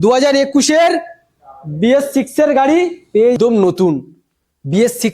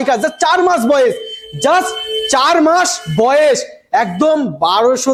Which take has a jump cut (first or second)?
first